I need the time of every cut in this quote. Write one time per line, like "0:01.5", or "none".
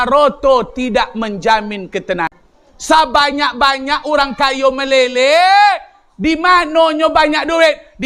0:02.3